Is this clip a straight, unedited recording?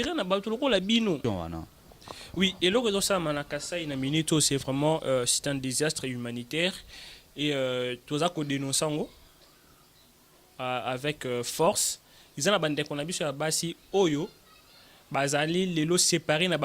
no; 1 cut; at 1.2 s

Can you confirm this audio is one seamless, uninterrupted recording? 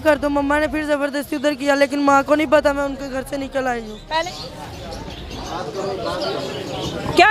no; 1 cut; at 4.2 s

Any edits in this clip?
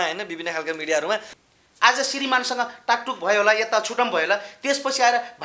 yes; 1 cut; at 1.4 s

